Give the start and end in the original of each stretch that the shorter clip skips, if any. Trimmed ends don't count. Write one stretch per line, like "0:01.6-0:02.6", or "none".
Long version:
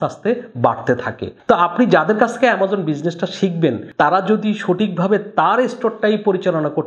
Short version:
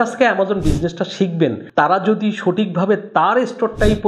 none